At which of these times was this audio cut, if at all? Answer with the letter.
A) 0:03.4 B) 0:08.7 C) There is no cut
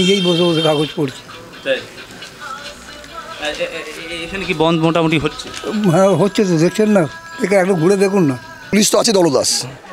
B